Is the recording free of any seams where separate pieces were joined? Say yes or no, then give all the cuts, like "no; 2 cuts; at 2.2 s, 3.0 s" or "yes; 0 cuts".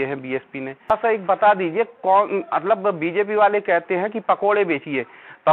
no; 1 cut; at 0.9 s